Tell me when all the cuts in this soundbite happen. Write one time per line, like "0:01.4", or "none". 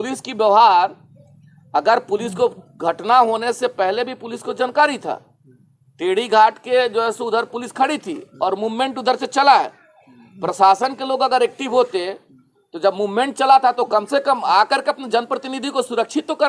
none